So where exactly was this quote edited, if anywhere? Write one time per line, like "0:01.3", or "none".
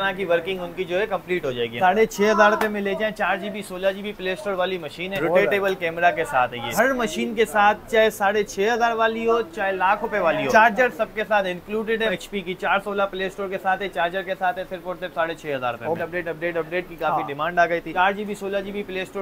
0:01.8
0:05.1
0:06.7
0:10.5
0:12.1
0:16.0
0:17.9